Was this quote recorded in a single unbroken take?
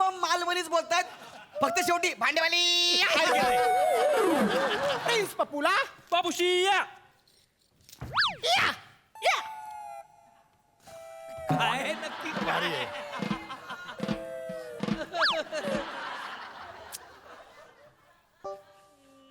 no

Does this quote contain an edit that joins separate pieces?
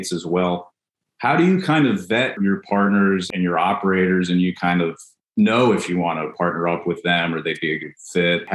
no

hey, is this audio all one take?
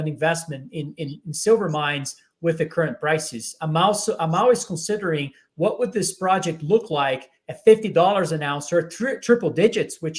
yes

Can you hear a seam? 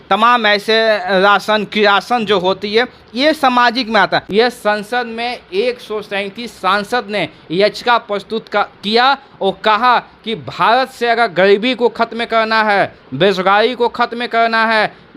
yes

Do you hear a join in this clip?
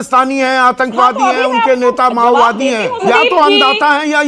yes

